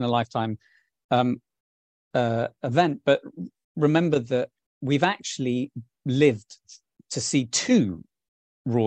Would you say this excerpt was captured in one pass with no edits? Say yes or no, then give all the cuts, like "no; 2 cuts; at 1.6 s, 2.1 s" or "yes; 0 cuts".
yes; 0 cuts